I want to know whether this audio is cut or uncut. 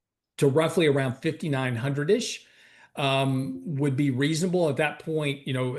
uncut